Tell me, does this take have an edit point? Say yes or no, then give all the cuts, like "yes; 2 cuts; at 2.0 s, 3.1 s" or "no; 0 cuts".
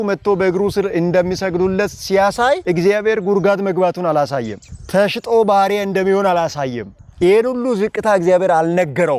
no; 0 cuts